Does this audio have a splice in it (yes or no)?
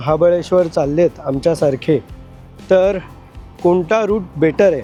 no